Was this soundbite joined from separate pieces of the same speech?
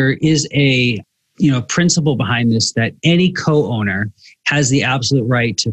no; 0 cuts

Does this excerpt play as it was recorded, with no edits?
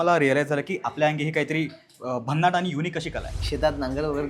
no; 1 cut; at 3.4 s

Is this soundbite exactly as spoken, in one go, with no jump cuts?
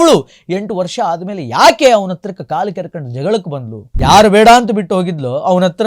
no; 1 cut; at 3.8 s

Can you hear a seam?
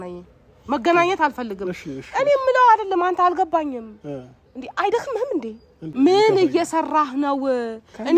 yes; 1 cut; at 5.9 s

